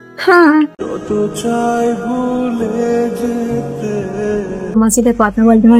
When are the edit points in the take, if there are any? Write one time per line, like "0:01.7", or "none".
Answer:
0:04.8